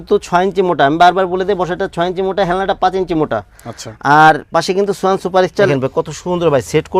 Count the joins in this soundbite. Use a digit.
1